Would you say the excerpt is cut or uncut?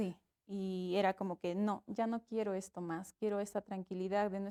uncut